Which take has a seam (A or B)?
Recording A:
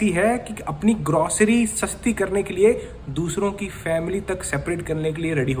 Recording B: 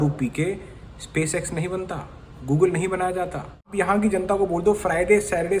B